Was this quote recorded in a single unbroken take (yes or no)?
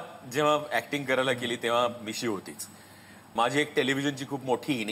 no